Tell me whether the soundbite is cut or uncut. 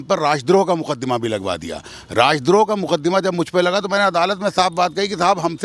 uncut